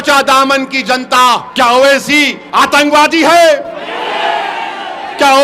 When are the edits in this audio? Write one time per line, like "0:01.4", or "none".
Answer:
0:01.5
0:02.4